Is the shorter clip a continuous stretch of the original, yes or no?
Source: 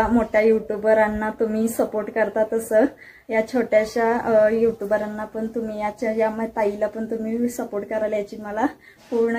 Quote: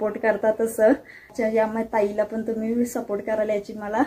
no